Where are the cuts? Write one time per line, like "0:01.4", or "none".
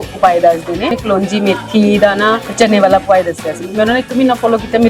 0:01.0
0:02.5